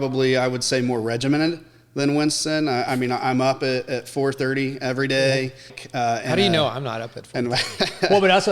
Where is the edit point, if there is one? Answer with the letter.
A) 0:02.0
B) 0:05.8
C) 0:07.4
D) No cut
B